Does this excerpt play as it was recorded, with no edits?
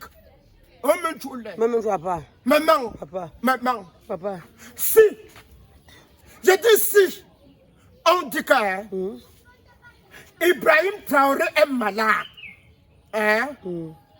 yes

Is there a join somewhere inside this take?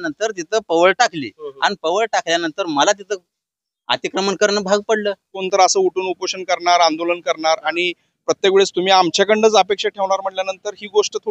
yes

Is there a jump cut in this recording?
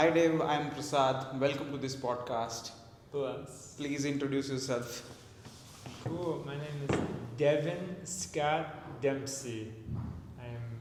no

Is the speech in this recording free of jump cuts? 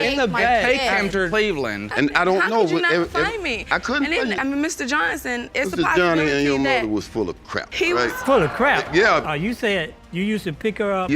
no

